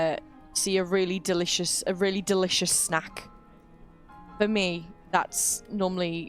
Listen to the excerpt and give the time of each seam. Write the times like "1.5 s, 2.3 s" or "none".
none